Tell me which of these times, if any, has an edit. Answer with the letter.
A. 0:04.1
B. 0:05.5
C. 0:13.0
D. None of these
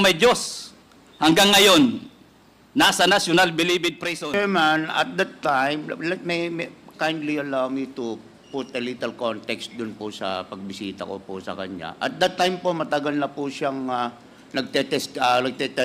A